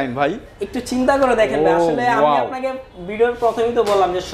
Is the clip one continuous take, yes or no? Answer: yes